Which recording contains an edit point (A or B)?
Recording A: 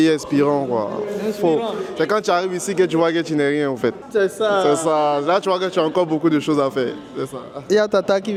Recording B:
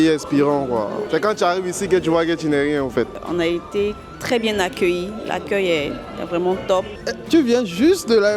B